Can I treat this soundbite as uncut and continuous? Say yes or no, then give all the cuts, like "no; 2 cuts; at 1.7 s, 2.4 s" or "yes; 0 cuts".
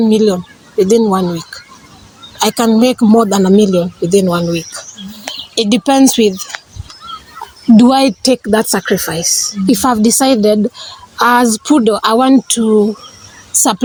yes; 0 cuts